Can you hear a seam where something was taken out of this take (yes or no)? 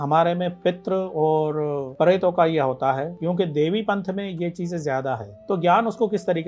yes